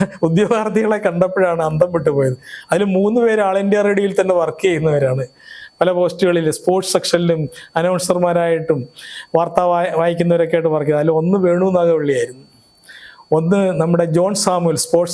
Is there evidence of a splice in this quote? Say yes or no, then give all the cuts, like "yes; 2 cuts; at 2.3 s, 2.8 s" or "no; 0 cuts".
no; 0 cuts